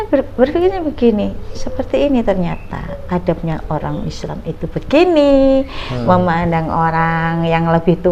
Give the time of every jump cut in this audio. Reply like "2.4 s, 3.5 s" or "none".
none